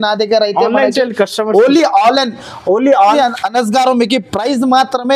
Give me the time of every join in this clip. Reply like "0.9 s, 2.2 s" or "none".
3.1 s